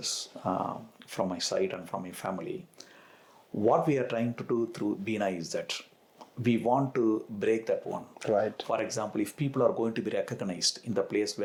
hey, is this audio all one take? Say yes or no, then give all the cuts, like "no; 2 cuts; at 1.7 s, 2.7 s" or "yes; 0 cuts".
yes; 0 cuts